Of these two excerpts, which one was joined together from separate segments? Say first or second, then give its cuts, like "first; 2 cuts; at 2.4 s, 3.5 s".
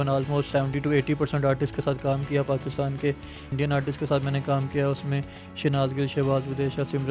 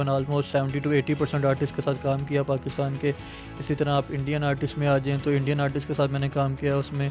first; 1 cut; at 3.6 s